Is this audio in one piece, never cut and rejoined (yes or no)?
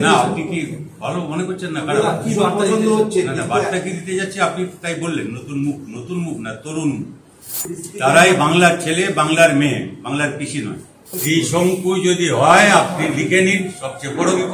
no